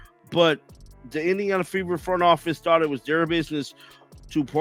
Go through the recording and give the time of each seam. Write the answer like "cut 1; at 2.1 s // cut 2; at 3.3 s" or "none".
none